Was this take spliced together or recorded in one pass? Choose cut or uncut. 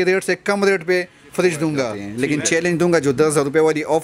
cut